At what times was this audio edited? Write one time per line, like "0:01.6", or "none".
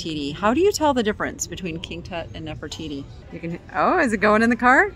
0:03.2